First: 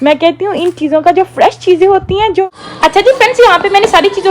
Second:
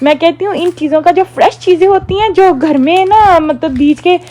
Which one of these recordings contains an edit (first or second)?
first